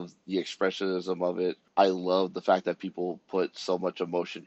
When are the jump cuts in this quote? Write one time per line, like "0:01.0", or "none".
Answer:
0:01.6